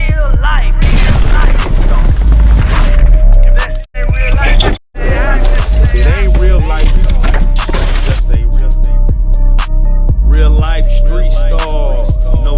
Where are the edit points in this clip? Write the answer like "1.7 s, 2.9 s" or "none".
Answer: none